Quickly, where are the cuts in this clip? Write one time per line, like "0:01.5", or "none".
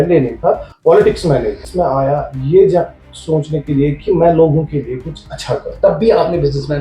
0:05.7